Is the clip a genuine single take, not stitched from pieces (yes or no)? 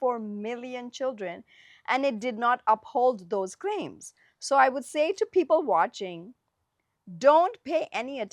yes